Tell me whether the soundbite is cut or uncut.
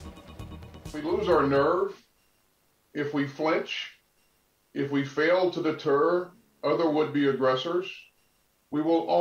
cut